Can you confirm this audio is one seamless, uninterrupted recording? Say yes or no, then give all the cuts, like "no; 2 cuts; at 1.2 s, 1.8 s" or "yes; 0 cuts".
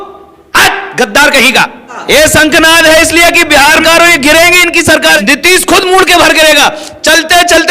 no; 3 cuts; at 1.9 s, 3.8 s, 5.2 s